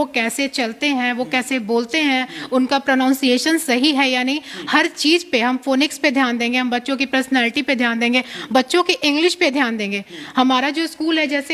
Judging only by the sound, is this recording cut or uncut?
uncut